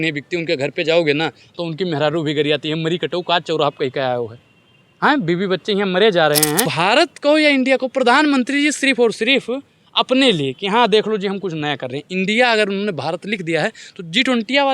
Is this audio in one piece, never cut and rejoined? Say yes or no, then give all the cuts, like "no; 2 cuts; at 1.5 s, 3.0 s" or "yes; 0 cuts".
no; 1 cut; at 6.7 s